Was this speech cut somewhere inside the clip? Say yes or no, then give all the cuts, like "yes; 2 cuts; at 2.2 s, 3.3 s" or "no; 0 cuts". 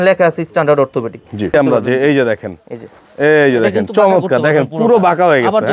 yes; 1 cut; at 1.5 s